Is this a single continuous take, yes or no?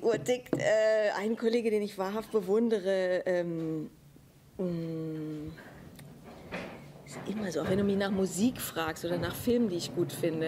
no